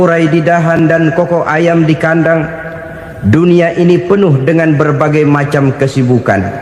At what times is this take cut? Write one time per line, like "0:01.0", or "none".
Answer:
none